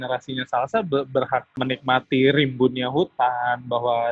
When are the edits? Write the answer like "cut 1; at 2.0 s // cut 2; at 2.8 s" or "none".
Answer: cut 1; at 1.6 s

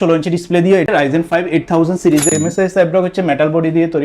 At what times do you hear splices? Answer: cut 1; at 0.9 s // cut 2; at 2.3 s

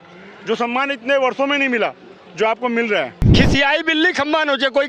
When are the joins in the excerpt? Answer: cut 1; at 3.2 s

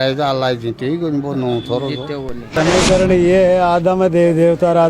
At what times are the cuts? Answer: cut 1; at 2.5 s

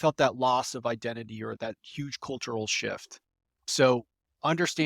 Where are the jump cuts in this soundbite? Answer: cut 1; at 1.6 s // cut 2; at 3.6 s

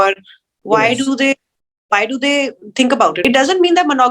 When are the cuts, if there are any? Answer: cut 1; at 3.2 s

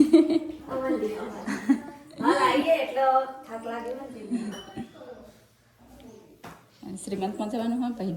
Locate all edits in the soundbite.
none

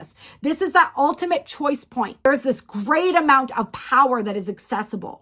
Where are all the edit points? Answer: cut 1; at 2.2 s

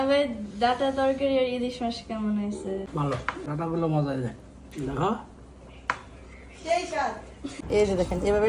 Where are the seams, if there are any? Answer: cut 1; at 2.9 s // cut 2; at 7.6 s

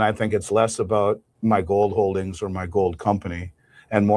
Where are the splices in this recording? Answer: cut 1; at 1.3 s

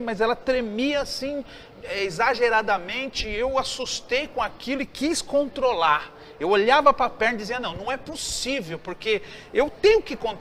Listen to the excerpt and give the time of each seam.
none

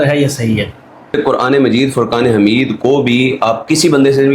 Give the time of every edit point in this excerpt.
cut 1; at 1.1 s

